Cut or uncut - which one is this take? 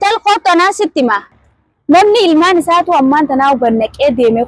cut